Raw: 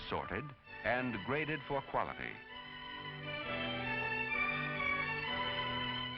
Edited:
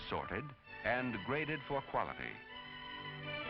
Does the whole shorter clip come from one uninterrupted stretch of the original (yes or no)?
yes